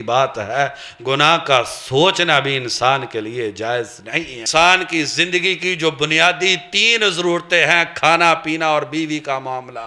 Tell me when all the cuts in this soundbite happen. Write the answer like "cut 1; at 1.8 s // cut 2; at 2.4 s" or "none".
cut 1; at 4.5 s